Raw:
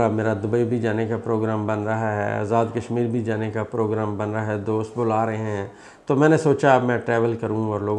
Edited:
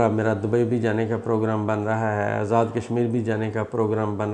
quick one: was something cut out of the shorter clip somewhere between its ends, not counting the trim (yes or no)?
no